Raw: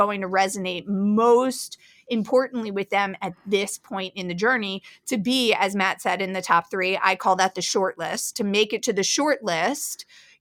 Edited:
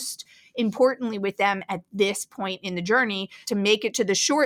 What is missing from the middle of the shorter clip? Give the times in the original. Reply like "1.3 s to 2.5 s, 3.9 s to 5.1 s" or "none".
4.9 s to 8.2 s